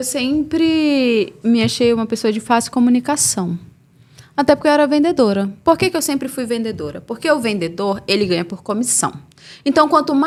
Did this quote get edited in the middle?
no; 0 cuts

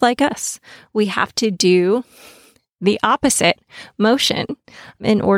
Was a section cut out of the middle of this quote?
no; 0 cuts

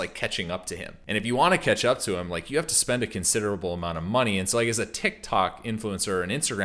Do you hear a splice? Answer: yes; 1 cut; at 0.9 s

